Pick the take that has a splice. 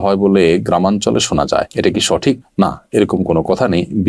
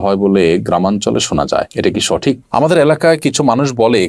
second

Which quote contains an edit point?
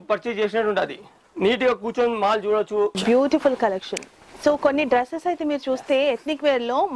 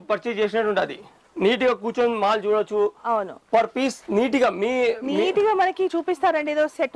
first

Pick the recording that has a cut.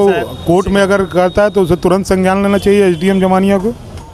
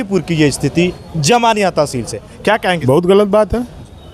second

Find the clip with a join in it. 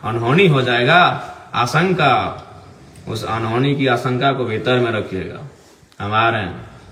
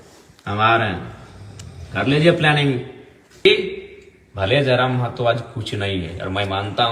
second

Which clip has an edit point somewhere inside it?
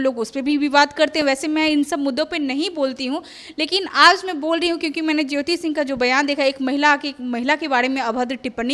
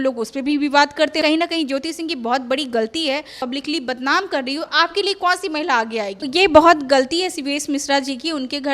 second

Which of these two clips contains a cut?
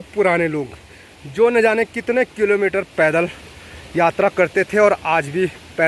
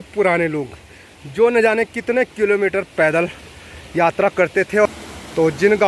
second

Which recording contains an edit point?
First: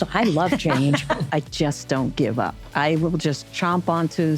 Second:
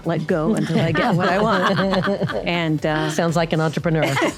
first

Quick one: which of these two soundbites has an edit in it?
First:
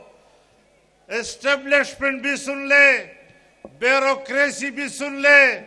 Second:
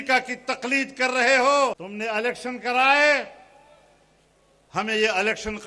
second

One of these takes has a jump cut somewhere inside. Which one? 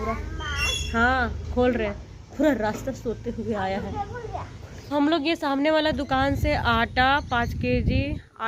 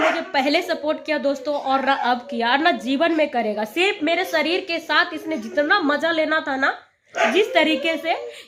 first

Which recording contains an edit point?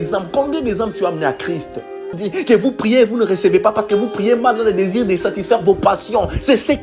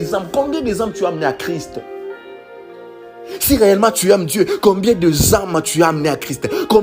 first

